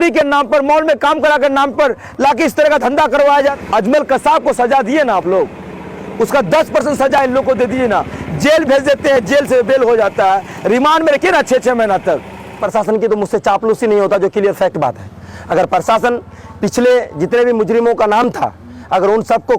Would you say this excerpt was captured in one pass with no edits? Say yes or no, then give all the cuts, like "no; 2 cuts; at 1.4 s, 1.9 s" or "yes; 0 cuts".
no; 2 cuts; at 3.6 s, 12.6 s